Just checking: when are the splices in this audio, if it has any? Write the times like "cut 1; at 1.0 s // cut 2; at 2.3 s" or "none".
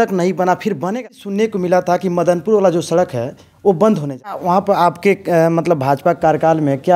cut 1; at 0.9 s // cut 2; at 4.4 s